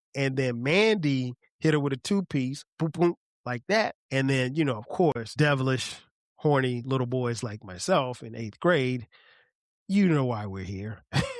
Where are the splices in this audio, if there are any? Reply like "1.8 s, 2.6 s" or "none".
4.0 s, 5.2 s